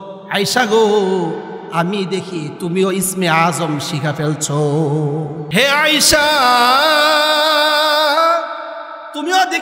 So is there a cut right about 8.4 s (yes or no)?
no